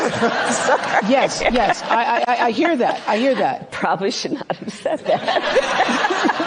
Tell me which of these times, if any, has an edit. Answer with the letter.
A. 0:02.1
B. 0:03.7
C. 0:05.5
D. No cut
B